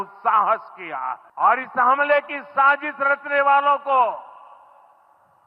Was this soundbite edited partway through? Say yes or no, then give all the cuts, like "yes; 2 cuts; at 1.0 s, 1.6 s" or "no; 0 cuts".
yes; 1 cut; at 1.2 s